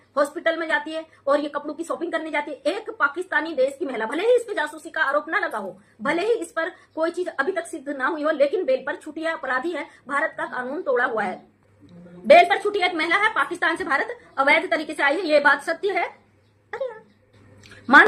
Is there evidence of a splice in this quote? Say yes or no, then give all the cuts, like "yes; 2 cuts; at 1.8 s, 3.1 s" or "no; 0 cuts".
no; 0 cuts